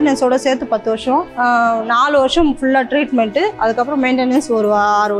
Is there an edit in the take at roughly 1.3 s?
yes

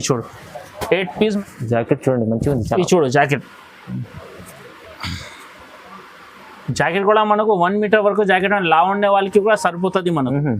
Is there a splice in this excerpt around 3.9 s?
no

